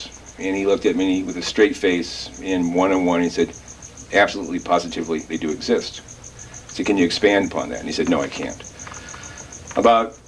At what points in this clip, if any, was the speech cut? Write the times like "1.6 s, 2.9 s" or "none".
none